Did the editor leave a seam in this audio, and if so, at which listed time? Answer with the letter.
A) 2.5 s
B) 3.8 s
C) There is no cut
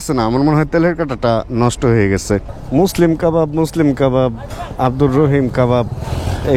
A